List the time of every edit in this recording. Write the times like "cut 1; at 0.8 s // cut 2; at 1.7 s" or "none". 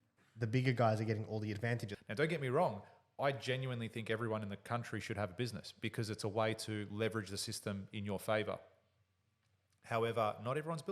cut 1; at 1.9 s